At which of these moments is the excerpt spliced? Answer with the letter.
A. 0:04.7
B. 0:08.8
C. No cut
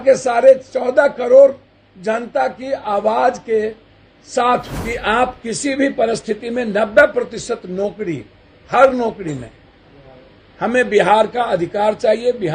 A